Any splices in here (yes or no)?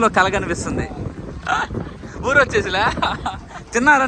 no